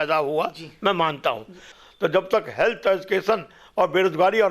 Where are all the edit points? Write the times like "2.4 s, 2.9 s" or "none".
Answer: 1.8 s